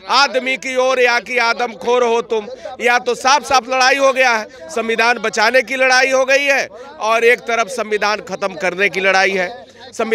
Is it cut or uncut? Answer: uncut